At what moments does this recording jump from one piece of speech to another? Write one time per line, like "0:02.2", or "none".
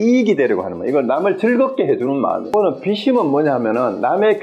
0:02.5